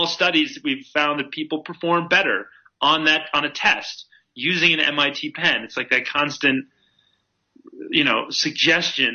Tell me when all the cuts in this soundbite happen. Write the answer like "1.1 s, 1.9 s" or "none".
none